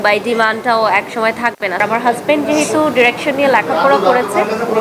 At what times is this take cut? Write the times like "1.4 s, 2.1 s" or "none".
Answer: 1.8 s